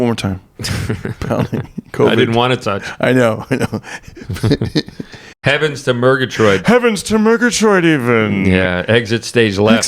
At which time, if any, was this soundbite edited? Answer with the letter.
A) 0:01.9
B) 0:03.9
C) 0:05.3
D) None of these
C